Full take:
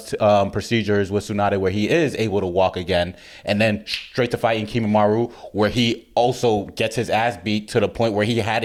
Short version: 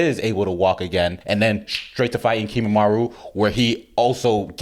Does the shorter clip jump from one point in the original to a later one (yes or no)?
yes